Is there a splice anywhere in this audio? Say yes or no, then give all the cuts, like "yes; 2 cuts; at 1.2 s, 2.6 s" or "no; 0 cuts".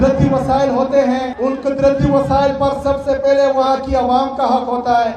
yes; 1 cut; at 1.3 s